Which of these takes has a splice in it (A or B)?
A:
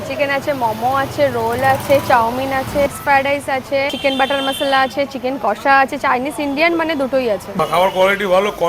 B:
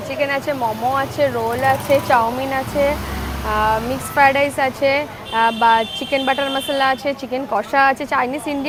A